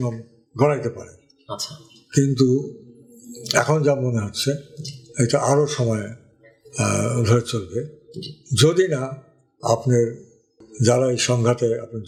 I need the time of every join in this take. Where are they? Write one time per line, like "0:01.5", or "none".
none